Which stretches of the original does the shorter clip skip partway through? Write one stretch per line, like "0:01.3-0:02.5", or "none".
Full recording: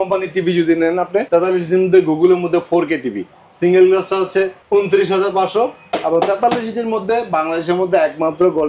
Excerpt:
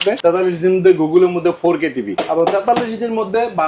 0:03.2-0:05.9